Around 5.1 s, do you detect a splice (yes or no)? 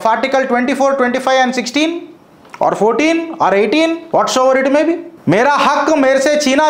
yes